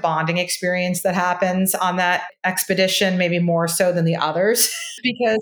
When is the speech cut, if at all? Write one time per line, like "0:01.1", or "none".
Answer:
0:02.3